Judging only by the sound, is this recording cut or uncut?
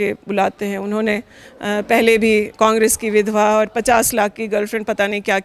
uncut